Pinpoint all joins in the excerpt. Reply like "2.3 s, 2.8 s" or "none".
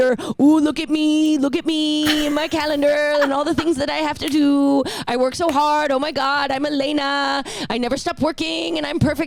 none